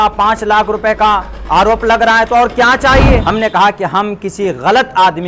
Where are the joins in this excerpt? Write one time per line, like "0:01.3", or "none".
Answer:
0:03.2

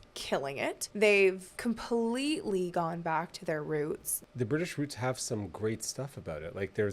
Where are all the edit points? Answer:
0:00.8
0:01.5
0:04.1

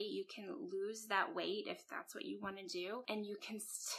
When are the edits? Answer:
0:03.0

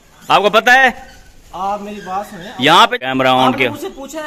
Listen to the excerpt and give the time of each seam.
0:02.9

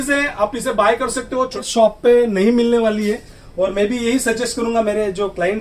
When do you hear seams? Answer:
0:01.6

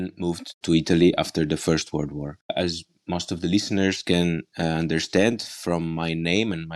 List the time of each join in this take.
0:02.5

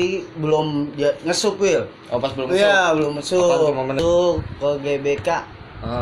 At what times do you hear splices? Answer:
0:04.0

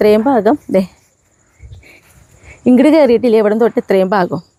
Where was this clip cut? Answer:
none

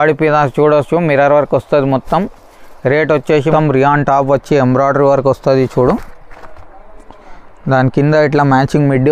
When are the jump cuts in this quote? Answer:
0:03.5

